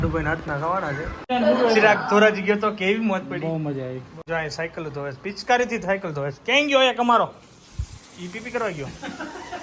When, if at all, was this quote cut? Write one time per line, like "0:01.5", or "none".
0:01.3
0:04.2